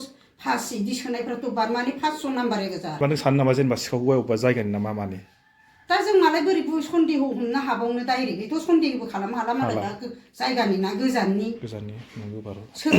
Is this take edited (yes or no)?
yes